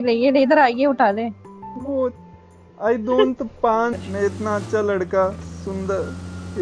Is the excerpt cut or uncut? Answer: cut